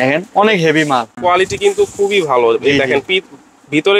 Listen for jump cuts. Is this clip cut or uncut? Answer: cut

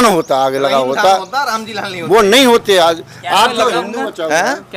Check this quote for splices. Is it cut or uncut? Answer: uncut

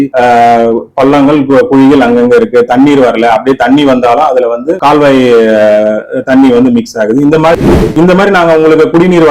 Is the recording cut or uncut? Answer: cut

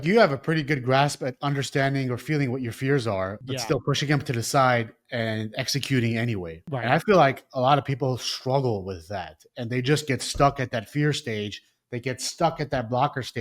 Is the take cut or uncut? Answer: cut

